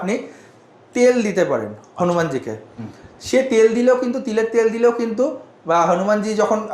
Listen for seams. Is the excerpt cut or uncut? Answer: uncut